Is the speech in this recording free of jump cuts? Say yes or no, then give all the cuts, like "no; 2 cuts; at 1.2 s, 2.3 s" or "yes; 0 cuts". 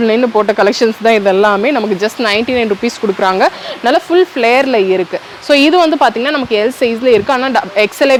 yes; 0 cuts